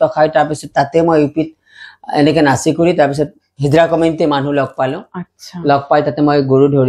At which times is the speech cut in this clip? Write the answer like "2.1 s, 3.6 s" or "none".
none